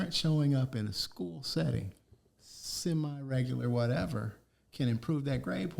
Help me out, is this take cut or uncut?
uncut